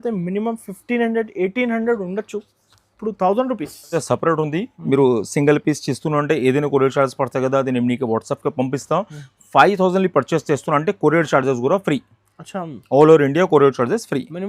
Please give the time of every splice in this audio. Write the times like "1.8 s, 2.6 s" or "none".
3.9 s